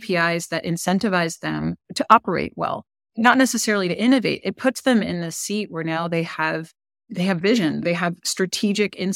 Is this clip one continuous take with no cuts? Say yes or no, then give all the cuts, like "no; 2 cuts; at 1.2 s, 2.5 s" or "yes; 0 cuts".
no; 1 cut; at 1.9 s